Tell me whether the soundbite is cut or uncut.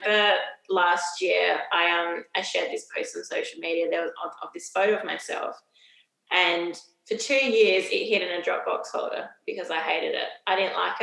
uncut